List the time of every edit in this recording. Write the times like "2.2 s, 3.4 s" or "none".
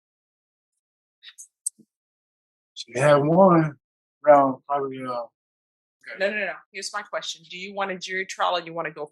6.1 s